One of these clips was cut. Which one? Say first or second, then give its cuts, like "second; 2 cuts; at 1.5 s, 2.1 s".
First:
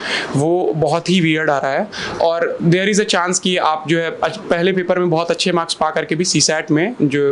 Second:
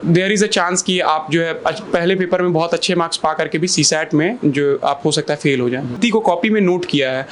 second; 1 cut; at 6.0 s